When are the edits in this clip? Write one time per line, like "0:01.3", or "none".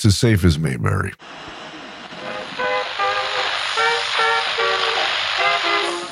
0:01.2